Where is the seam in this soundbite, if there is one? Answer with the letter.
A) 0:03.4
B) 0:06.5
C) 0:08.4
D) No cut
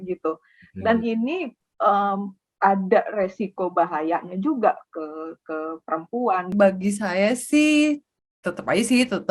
B